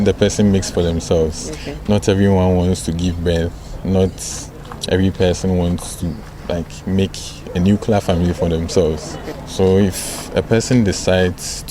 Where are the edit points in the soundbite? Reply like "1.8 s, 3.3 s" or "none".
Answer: none